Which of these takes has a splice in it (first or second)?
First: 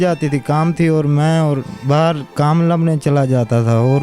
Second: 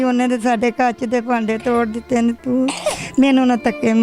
first